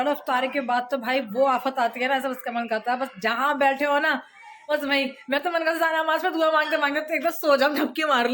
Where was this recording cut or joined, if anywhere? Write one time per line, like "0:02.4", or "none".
none